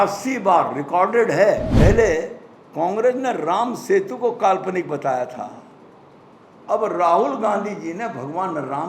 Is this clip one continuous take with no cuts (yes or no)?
no